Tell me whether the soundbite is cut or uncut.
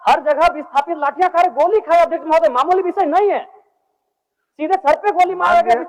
uncut